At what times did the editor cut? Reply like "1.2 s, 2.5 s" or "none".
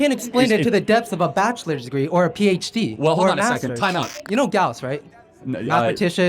4.2 s